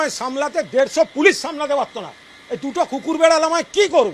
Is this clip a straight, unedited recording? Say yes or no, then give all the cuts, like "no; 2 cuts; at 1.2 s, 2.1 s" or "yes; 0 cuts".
yes; 0 cuts